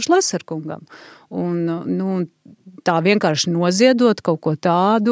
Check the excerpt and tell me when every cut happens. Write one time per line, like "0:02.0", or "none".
none